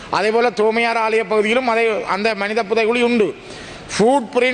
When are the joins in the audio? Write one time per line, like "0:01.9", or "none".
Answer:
none